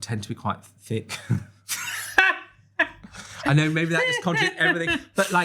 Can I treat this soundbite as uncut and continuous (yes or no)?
yes